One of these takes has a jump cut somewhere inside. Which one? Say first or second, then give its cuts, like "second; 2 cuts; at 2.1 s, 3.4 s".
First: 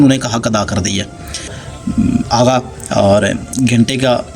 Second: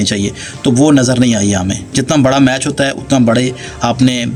first; 1 cut; at 1.6 s